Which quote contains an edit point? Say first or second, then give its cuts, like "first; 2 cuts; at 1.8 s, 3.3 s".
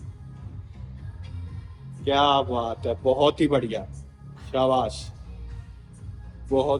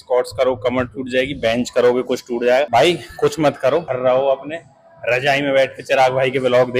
second; 2 cuts; at 2.7 s, 3.9 s